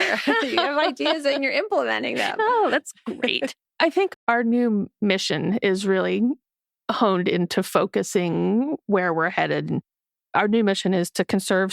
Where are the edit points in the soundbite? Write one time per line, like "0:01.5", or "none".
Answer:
0:04.1